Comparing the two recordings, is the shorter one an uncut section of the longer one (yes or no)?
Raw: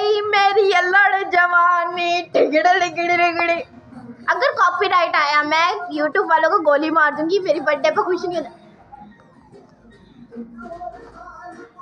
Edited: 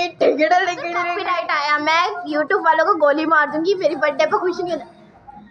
no